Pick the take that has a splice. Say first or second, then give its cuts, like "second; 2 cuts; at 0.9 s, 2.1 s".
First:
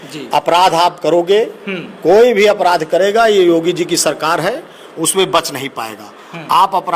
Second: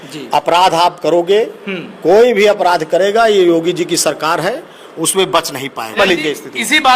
second; 1 cut; at 6.0 s